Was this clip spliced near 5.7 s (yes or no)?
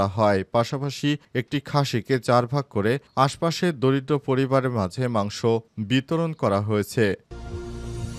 no